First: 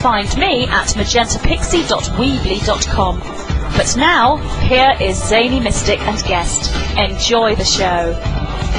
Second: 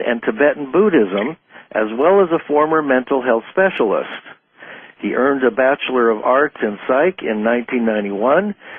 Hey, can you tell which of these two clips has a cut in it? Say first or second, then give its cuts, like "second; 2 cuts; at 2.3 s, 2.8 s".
second; 1 cut; at 1.6 s